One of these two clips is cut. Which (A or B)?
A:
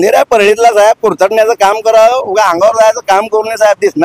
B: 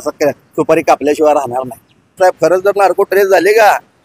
B